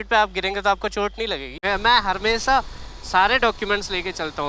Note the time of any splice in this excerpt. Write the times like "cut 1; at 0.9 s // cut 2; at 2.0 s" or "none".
cut 1; at 1.5 s